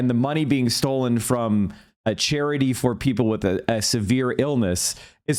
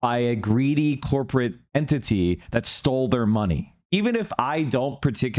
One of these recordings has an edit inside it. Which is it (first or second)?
second